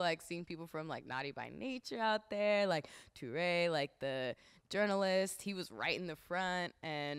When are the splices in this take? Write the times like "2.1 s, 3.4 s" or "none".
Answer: none

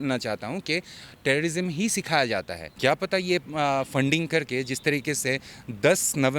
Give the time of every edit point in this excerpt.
2.6 s

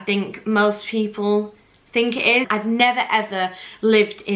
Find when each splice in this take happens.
2.5 s

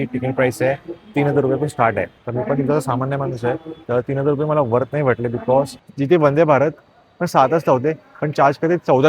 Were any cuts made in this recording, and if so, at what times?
2.2 s, 5.8 s

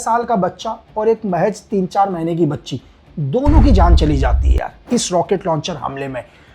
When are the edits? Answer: none

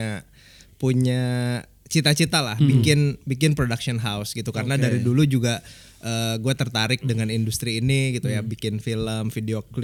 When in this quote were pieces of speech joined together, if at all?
none

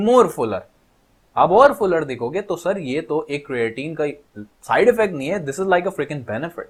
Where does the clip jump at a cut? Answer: none

